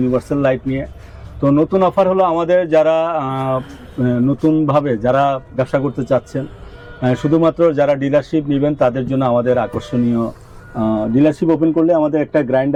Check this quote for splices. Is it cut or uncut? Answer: uncut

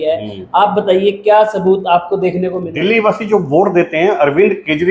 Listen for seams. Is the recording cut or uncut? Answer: cut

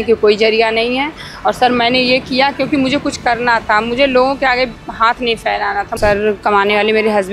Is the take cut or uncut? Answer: cut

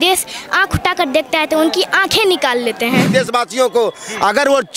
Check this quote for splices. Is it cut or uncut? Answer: cut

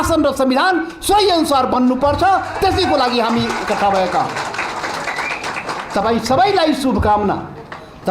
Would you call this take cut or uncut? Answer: uncut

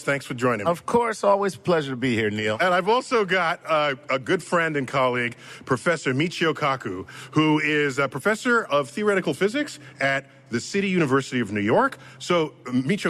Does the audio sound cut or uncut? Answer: cut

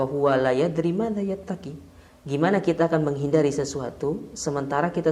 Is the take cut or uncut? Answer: uncut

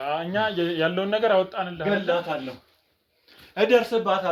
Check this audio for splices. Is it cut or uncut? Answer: uncut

